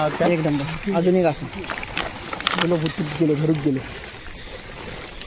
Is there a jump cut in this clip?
no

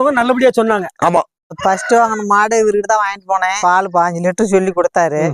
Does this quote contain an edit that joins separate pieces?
yes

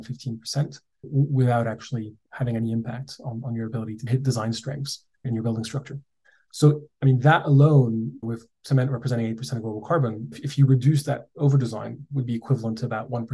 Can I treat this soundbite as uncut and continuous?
no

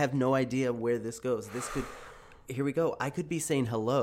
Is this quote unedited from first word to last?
yes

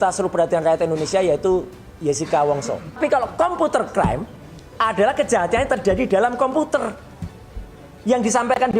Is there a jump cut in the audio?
yes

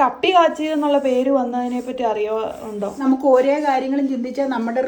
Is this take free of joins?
no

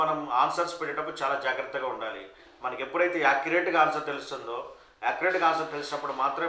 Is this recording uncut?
yes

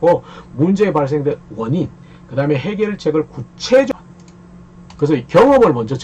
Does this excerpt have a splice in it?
yes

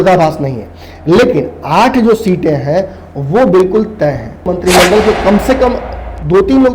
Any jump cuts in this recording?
yes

